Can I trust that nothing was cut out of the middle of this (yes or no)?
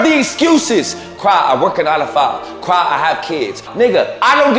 no